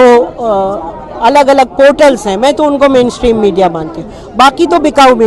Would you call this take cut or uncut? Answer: uncut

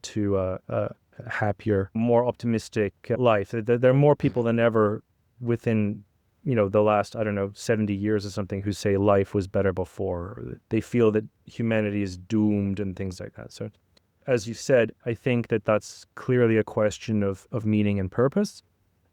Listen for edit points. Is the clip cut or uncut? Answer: cut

